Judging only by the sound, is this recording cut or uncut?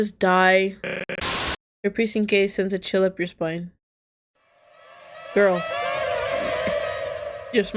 cut